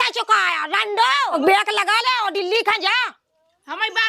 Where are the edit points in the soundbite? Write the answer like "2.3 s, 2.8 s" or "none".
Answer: 1.3 s